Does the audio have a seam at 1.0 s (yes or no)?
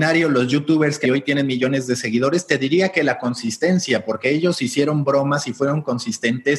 yes